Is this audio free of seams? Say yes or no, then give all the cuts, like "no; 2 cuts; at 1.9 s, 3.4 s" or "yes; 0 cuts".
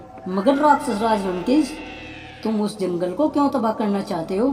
yes; 0 cuts